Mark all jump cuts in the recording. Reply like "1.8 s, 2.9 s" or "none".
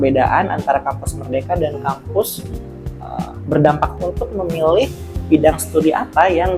3.9 s